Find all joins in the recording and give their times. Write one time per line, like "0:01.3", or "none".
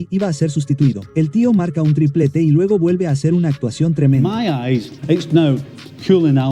0:04.3